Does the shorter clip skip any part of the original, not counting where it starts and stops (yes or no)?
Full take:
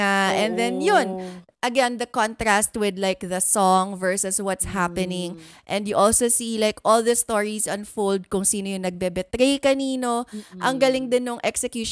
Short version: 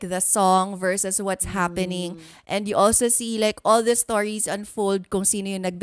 no